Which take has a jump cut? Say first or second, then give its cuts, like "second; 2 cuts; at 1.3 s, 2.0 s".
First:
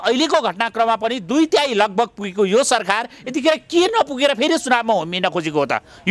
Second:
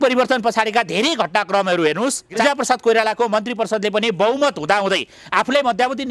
second; 1 cut; at 2.4 s